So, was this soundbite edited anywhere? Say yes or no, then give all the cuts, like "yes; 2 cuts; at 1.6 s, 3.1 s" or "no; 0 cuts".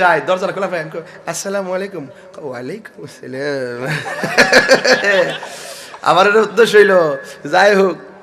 no; 0 cuts